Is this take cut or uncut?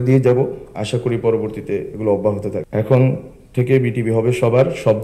cut